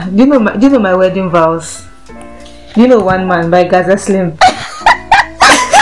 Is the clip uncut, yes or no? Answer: yes